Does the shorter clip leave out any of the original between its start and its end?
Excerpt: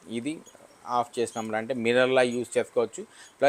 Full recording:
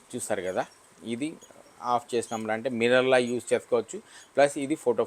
no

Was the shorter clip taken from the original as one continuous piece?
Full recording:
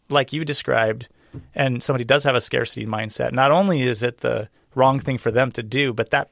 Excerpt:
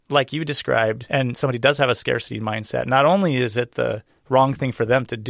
no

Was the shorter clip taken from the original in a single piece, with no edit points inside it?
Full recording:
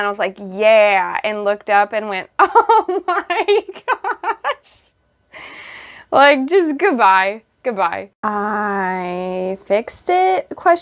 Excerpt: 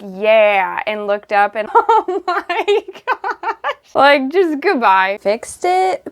no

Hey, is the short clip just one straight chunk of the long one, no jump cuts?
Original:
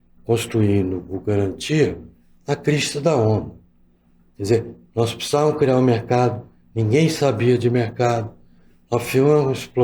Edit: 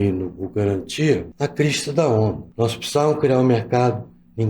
no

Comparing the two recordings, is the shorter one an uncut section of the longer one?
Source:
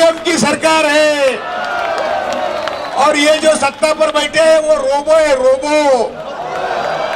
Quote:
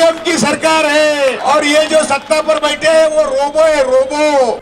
no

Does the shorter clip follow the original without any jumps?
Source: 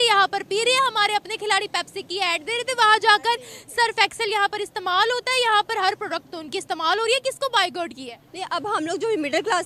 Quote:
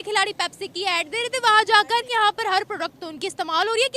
no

